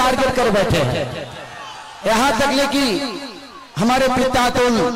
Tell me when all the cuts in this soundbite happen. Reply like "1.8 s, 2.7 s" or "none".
none